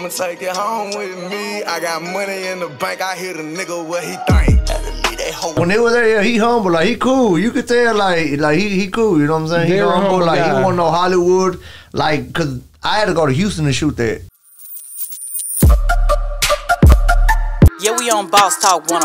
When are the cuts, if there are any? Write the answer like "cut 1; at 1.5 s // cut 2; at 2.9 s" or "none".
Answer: cut 1; at 14.5 s